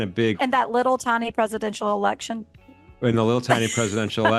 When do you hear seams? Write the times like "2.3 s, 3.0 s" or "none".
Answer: none